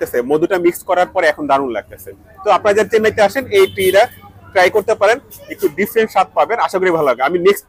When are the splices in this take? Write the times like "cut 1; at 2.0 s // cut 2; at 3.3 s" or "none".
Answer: none